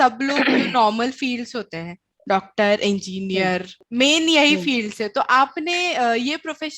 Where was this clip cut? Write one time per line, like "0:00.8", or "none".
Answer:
0:03.8